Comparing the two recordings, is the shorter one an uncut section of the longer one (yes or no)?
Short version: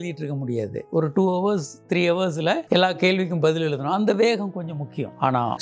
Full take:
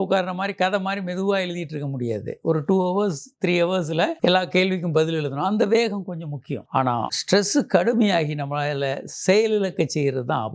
yes